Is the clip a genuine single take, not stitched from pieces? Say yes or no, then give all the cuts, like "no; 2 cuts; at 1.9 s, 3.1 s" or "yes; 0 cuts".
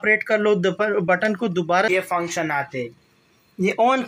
no; 1 cut; at 1.9 s